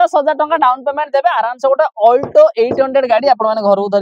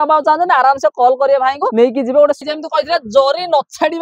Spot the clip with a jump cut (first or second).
second